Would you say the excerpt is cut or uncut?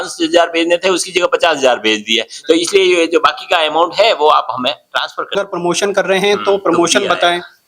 cut